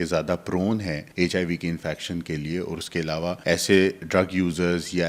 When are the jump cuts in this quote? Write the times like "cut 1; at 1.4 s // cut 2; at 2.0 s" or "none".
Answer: cut 1; at 1.0 s // cut 2; at 3.4 s